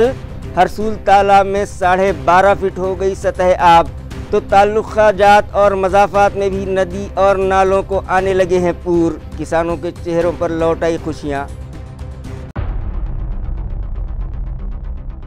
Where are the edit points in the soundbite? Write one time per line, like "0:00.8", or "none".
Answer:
none